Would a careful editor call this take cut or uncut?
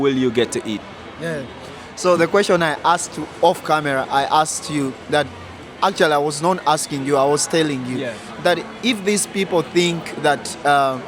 uncut